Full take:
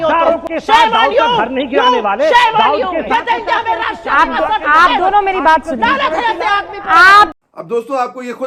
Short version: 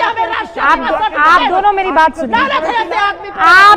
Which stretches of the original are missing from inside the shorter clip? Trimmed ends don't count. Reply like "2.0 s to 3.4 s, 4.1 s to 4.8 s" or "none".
none